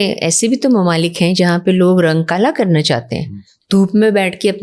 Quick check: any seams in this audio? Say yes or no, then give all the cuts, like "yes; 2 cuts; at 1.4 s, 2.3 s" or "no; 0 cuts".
no; 0 cuts